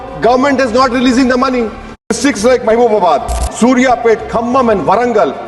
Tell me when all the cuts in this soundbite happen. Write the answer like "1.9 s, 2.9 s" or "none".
2.2 s